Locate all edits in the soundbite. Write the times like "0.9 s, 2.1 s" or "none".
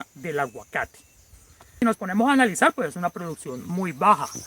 1.8 s